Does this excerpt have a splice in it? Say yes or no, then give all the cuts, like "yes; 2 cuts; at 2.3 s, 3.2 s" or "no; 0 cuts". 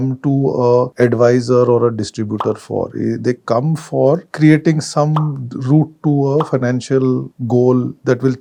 no; 0 cuts